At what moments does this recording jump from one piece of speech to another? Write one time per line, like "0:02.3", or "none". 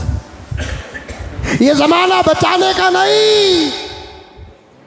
0:01.5